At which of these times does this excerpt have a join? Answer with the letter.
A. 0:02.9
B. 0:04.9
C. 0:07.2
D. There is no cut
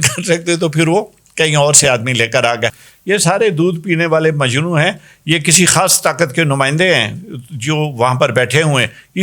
A